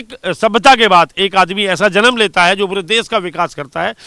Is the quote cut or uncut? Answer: uncut